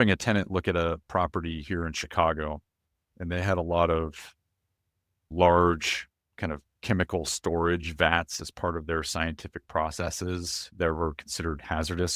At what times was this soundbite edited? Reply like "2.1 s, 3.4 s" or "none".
none